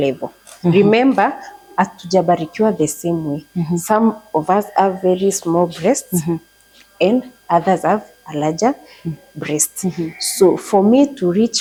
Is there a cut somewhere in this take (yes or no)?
no